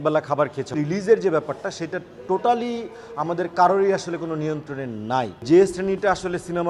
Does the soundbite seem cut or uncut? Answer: cut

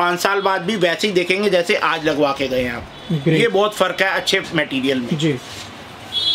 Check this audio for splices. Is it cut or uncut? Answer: uncut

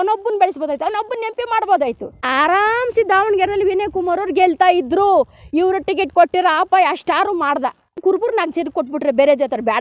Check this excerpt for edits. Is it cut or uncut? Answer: cut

